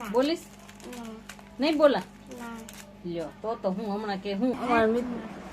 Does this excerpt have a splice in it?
yes; 1 cut; at 4.5 s

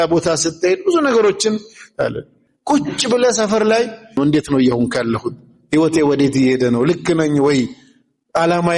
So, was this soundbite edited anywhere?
yes; 2 cuts; at 2.3 s, 4.2 s

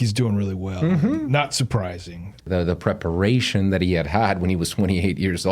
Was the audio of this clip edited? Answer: yes; 1 cut; at 2.5 s

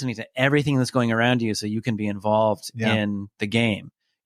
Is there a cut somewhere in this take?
no; 0 cuts

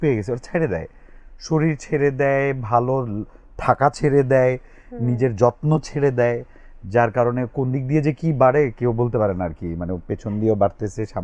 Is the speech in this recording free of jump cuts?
yes; 0 cuts

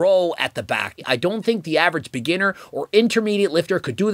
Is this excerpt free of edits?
no; 1 cut; at 1.0 s

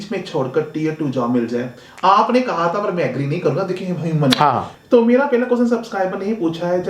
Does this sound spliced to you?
yes; 1 cut; at 4.8 s

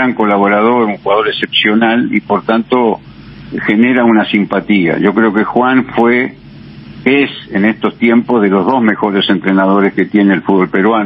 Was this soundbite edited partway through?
no; 0 cuts

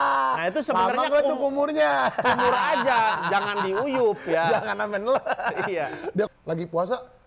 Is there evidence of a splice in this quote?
yes; 1 cut; at 6.3 s

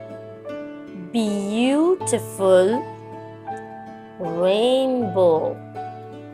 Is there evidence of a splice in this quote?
yes; 3 cuts; at 3.0 s, 4.2 s, 5.6 s

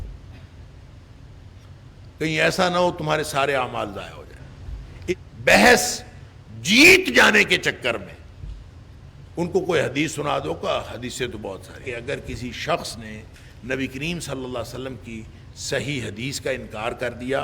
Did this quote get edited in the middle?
yes; 2 cuts; at 5.1 s, 11.8 s

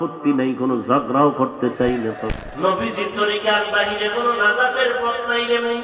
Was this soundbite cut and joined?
yes; 1 cut; at 2.1 s

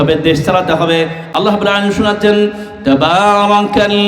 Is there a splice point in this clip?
yes; 1 cut; at 1.2 s

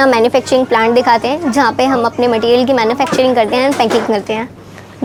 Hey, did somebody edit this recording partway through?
no; 0 cuts

